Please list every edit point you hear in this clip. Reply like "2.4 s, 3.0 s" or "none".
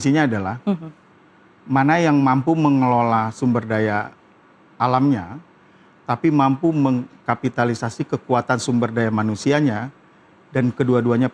none